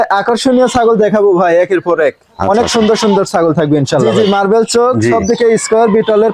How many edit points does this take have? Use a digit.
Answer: 1